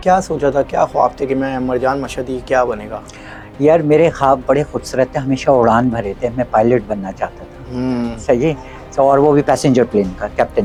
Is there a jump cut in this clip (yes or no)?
no